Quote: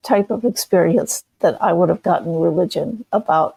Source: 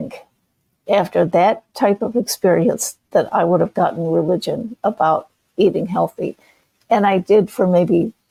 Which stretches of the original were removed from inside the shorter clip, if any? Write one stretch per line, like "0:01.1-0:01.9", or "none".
none